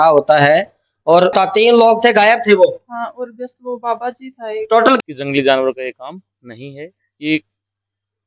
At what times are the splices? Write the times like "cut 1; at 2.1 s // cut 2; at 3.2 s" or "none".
cut 1; at 1.3 s // cut 2; at 5.0 s